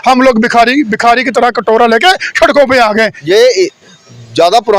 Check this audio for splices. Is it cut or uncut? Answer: cut